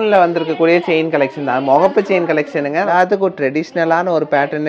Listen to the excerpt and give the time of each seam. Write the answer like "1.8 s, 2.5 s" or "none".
2.9 s